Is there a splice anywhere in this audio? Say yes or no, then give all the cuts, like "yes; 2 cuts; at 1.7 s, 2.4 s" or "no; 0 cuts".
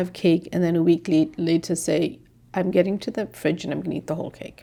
no; 0 cuts